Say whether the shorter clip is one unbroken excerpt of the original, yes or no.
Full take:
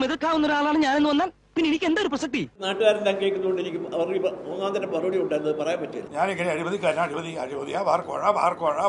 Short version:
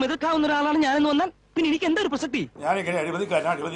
no